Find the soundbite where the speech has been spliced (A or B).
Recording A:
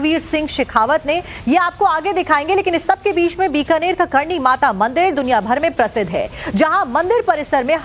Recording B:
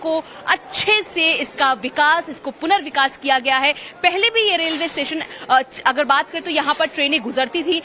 B